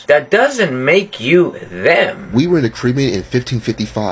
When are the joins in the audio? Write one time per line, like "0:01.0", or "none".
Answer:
0:02.2